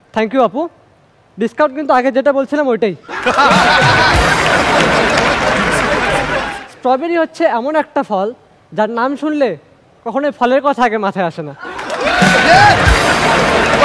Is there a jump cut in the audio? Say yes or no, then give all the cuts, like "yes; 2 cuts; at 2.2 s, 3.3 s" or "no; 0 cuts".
yes; 1 cut; at 6.5 s